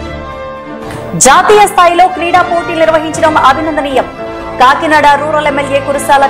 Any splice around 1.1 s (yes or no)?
yes